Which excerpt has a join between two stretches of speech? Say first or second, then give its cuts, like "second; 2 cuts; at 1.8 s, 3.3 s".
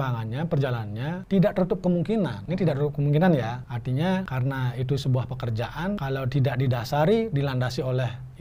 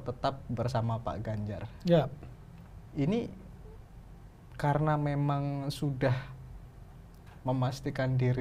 first; 5 cuts; at 1.2 s, 2.4 s, 3.7 s, 4.3 s, 6.0 s